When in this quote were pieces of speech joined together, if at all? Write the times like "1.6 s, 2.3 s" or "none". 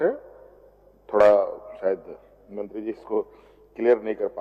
none